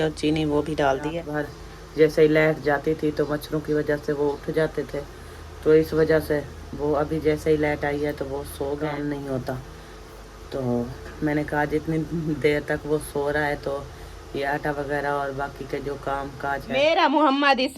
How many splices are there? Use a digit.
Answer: 3